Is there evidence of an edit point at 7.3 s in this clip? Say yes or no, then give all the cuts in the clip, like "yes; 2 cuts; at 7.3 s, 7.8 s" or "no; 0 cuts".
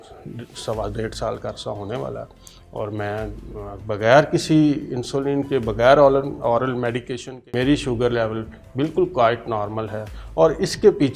yes; 1 cut; at 7.3 s